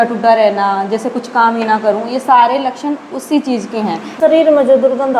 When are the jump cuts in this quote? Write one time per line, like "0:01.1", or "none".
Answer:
0:04.1